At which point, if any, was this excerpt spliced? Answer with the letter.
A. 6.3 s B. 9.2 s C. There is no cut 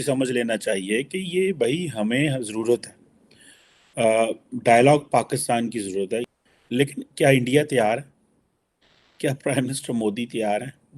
A